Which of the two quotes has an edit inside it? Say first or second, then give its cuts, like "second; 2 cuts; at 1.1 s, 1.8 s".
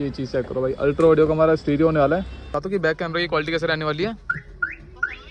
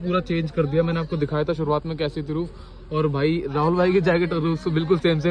first; 1 cut; at 2.5 s